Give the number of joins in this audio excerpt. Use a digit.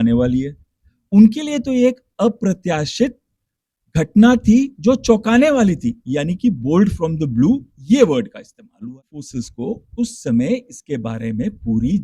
1